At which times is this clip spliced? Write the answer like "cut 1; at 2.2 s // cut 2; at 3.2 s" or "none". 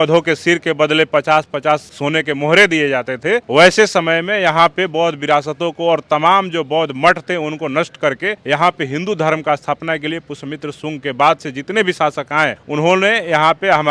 none